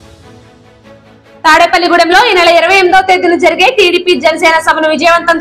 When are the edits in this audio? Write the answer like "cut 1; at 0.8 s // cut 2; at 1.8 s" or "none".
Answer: none